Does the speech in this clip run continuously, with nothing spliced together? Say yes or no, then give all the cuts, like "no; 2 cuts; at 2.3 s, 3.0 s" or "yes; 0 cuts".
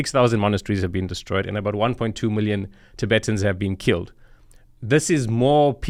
yes; 0 cuts